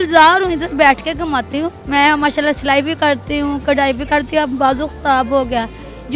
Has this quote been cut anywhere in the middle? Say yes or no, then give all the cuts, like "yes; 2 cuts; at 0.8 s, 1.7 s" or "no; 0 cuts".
yes; 1 cut; at 1.8 s